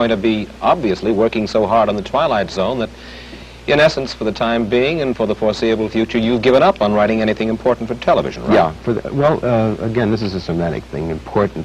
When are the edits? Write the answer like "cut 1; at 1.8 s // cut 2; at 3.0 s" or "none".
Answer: cut 1; at 5.6 s